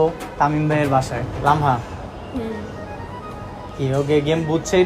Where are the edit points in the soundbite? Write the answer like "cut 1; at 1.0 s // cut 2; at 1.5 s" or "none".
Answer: cut 1; at 1.2 s // cut 2; at 3.3 s